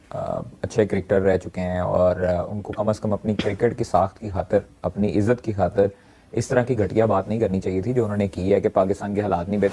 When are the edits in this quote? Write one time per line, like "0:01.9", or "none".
none